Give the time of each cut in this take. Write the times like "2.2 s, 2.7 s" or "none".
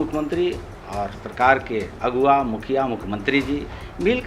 none